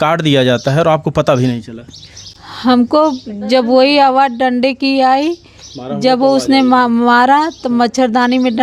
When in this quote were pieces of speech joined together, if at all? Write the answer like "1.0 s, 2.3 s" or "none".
none